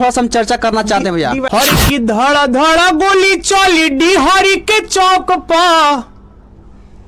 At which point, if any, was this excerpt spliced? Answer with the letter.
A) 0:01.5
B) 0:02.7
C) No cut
A